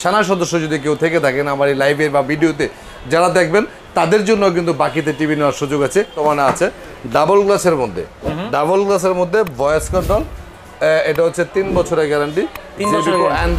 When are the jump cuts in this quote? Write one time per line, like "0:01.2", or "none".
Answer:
0:06.1